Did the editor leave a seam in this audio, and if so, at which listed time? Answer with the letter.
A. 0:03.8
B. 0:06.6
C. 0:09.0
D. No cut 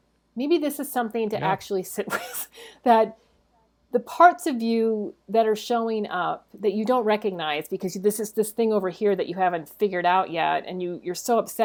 D